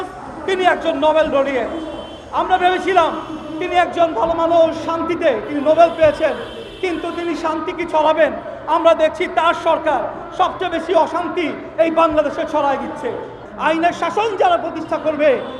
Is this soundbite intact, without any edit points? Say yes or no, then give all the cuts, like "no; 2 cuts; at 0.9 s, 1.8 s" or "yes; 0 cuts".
no; 1 cut; at 13.4 s